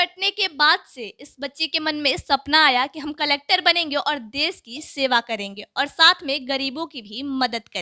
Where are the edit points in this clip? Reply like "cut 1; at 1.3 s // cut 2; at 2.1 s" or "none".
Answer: none